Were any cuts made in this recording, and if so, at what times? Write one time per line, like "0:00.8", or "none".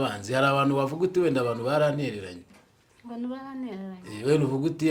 none